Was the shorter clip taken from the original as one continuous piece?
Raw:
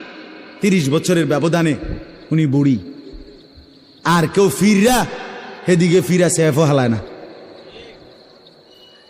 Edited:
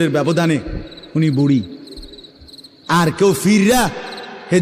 yes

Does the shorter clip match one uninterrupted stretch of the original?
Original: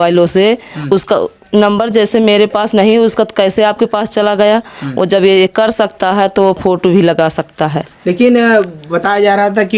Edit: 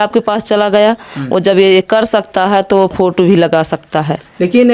yes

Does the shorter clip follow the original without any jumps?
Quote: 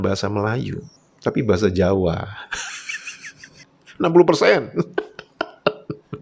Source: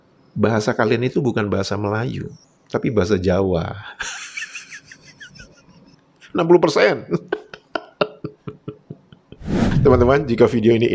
no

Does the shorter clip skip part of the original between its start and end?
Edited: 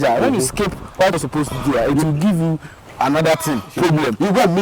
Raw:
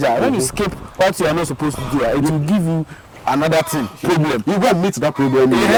yes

